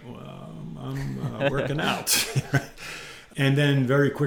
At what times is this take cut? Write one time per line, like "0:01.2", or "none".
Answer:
0:03.2